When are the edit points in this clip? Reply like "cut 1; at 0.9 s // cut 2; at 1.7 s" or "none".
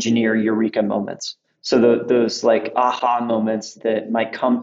none